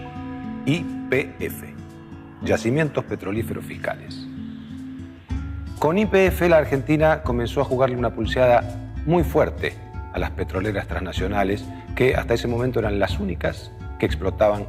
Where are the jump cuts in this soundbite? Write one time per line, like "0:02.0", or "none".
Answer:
0:04.4